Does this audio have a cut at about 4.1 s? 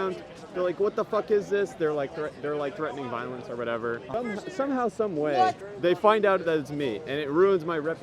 yes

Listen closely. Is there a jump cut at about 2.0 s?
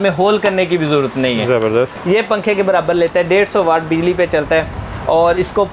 yes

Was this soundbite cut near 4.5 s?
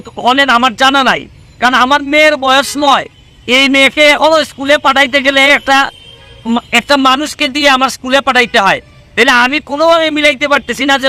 no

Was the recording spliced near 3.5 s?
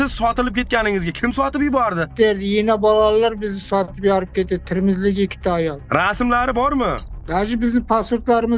no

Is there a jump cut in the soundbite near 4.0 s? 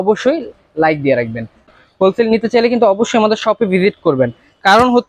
no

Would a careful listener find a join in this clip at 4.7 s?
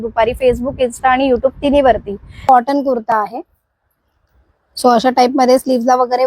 no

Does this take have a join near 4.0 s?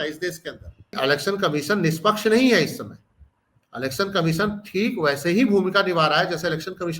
no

